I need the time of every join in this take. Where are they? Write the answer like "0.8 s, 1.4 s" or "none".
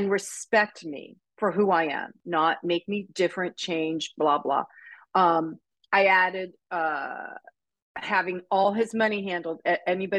none